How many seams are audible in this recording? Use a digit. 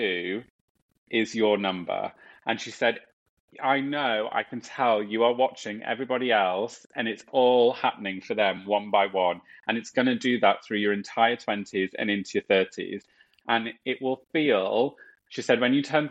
0